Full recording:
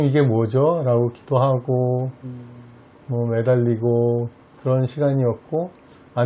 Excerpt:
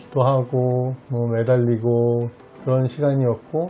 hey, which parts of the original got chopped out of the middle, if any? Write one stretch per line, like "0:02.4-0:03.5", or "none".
0:02.2-0:03.0